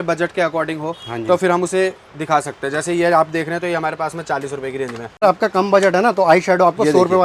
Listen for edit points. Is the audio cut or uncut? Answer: cut